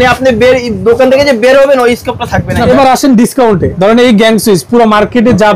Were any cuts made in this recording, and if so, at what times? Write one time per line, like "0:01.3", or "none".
0:02.6
0:03.7